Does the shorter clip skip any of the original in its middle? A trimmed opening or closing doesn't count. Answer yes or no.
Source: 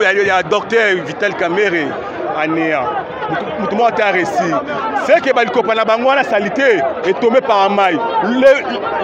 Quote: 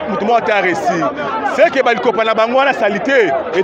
no